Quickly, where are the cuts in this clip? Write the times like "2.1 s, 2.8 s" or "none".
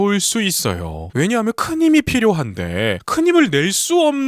3.0 s